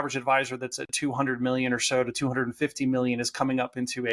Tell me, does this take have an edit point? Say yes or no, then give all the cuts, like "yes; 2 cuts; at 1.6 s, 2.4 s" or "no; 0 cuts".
no; 0 cuts